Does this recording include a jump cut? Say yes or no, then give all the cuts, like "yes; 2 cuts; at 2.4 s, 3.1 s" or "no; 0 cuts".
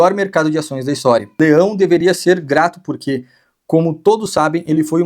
yes; 1 cut; at 1.4 s